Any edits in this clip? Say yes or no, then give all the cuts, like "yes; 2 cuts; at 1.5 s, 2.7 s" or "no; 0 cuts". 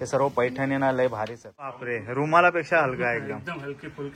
yes; 1 cut; at 1.9 s